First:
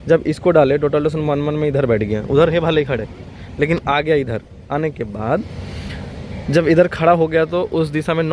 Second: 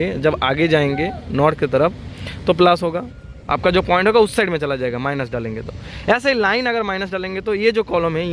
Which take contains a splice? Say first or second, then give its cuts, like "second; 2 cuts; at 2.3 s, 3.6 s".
second; 1 cut; at 3.0 s